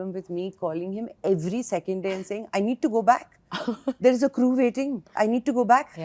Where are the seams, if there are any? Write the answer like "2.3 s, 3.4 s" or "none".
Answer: none